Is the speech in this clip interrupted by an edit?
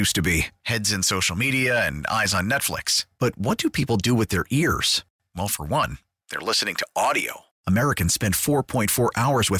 no; 0 cuts

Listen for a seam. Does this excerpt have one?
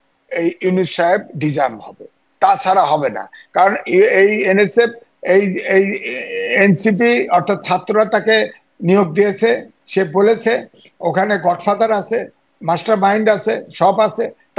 no; 0 cuts

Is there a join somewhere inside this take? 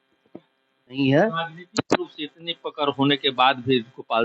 yes; 1 cut; at 1.0 s

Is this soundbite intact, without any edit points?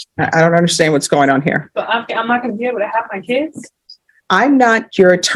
yes; 0 cuts

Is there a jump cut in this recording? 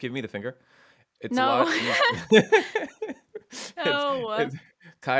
no; 0 cuts

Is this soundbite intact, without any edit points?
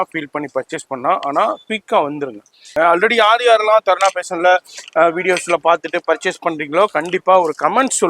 no; 1 cut; at 2.7 s

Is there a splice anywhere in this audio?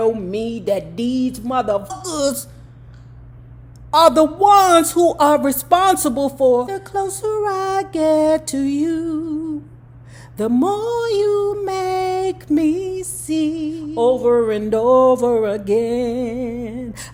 no; 0 cuts

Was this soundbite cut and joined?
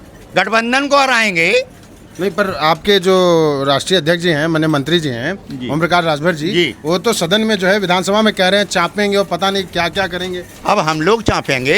no; 0 cuts

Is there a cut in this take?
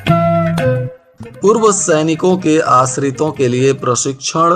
yes; 1 cut; at 1.0 s

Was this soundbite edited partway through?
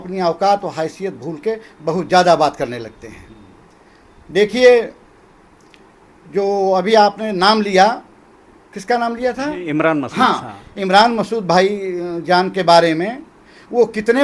no; 0 cuts

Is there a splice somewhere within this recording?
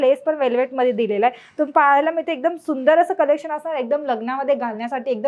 no; 0 cuts

